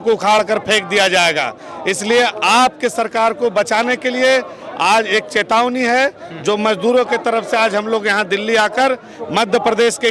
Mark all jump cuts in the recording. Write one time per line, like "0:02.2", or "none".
none

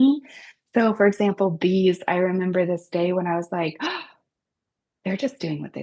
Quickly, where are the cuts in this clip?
none

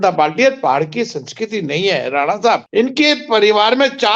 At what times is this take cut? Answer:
0:02.7

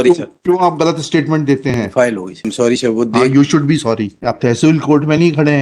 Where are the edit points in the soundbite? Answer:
0:02.4
0:04.1

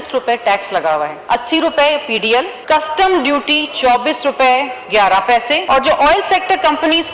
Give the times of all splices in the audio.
0:01.2
0:02.6
0:05.6

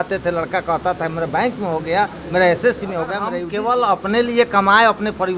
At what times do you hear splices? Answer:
0:03.4

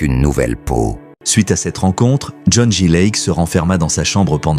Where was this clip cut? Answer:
0:01.1

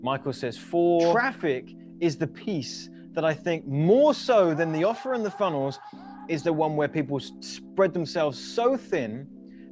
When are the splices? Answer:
0:01.1

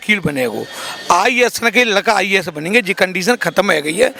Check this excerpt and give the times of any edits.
none

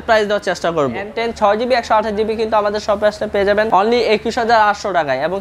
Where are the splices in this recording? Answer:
0:01.1
0:03.7

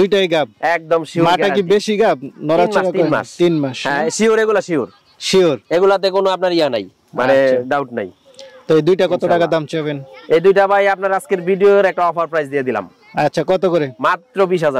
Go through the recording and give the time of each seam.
none

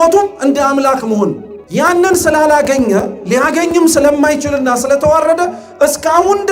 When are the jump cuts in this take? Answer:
0:01.5

